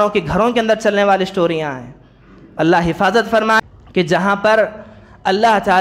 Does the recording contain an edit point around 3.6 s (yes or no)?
yes